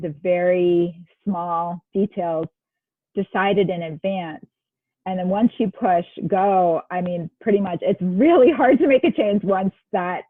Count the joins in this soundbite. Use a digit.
0